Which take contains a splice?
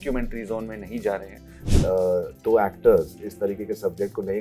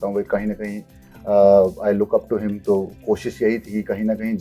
first; 1 cut; at 1.6 s

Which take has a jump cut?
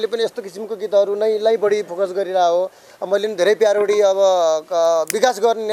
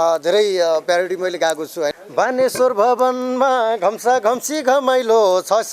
second; 1 cut; at 2.0 s

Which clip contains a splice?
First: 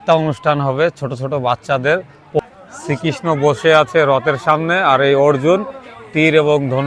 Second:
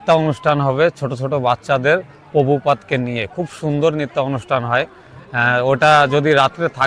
first; 1 cut; at 2.4 s

